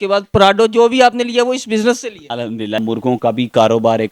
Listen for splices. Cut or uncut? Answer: cut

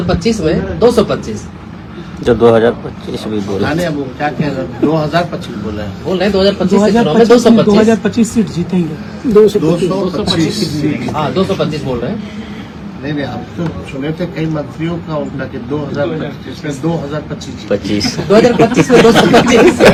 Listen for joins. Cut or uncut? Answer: uncut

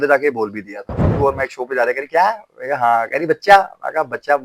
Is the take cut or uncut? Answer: cut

